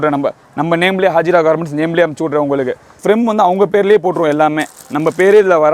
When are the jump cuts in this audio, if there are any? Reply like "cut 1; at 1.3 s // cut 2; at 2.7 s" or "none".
cut 1; at 2.9 s